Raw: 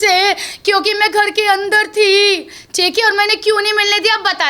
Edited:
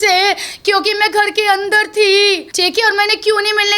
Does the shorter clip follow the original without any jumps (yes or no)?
no